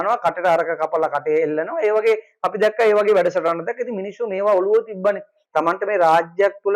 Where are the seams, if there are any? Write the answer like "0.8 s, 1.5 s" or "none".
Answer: 5.3 s